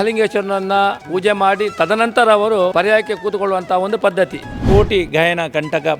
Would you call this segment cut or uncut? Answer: cut